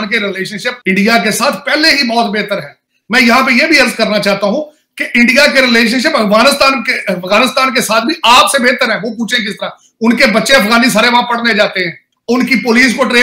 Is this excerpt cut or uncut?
uncut